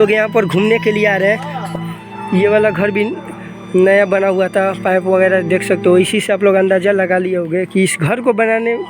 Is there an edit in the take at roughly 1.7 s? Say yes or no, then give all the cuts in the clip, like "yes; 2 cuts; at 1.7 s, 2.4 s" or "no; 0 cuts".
yes; 1 cut; at 1.7 s